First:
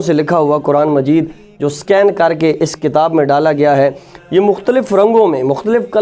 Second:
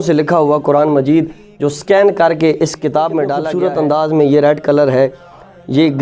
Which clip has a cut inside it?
second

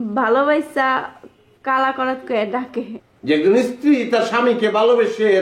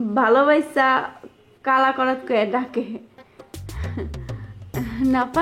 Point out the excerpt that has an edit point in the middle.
first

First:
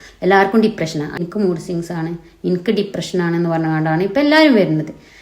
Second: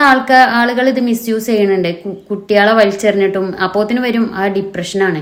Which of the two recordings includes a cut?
first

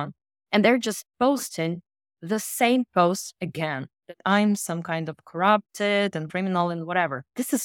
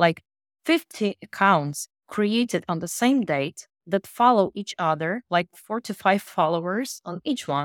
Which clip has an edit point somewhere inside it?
first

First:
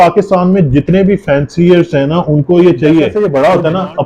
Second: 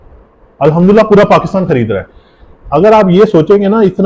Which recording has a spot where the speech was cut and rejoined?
first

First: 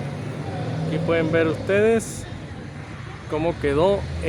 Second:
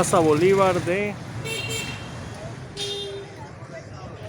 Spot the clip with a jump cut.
second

